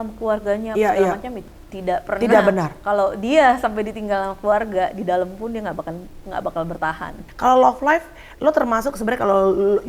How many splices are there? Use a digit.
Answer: 2